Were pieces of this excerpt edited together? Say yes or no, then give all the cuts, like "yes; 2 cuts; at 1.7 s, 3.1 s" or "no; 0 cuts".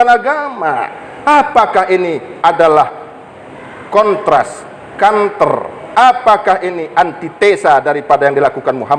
no; 0 cuts